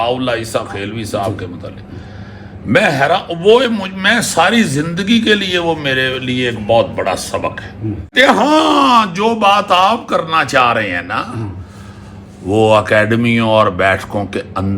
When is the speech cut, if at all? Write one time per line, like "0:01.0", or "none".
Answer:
0:08.1

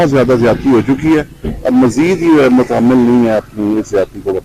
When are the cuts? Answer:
none

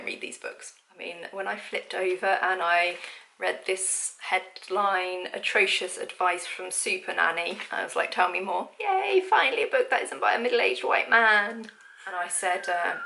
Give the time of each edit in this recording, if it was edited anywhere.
0:00.9
0:08.7
0:11.5

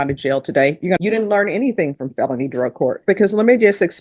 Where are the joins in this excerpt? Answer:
0:01.0

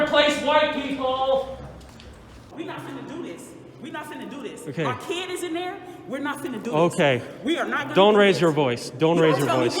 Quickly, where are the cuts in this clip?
0:02.5

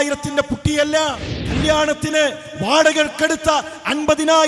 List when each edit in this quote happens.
0:01.3

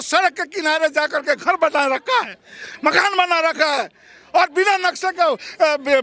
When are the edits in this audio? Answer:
none

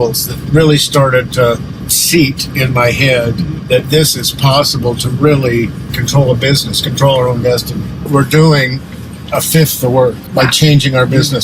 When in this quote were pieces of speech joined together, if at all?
0:03.6
0:05.8
0:08.1
0:10.2

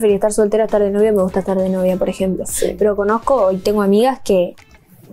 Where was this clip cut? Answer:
none

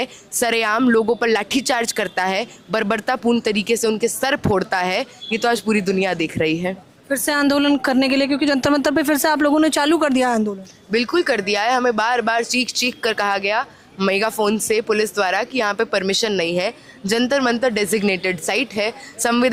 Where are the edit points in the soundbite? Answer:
none

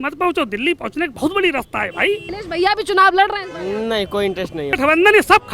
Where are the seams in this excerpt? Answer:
0:02.3
0:04.7

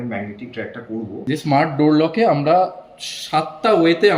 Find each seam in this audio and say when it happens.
0:01.1

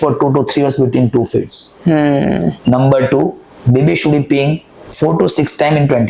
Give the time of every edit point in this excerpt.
none

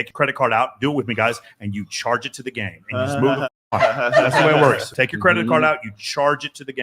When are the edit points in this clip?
0:04.9

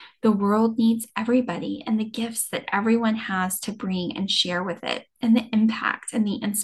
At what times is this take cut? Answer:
none

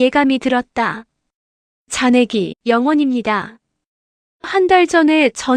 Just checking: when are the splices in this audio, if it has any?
0:02.5

